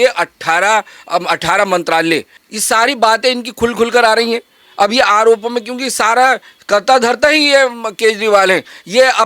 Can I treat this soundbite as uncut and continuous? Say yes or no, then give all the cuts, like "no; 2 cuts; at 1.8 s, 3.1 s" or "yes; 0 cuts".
no; 1 cut; at 2.4 s